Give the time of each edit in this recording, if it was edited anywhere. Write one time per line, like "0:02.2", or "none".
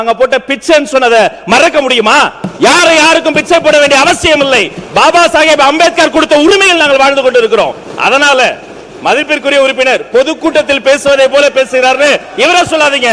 none